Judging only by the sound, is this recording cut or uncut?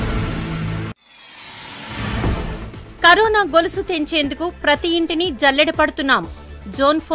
cut